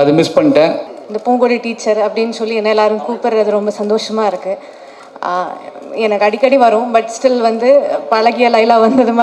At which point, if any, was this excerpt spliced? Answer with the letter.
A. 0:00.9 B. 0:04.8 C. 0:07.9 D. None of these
A